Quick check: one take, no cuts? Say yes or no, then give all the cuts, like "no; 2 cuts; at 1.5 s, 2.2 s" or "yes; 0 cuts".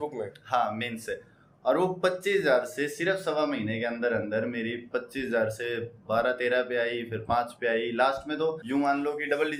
yes; 0 cuts